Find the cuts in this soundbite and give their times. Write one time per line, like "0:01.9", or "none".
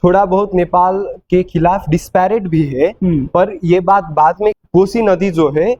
0:04.6